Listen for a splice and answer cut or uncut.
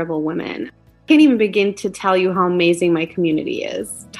cut